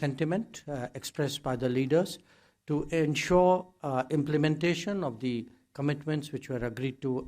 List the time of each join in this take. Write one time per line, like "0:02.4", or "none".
none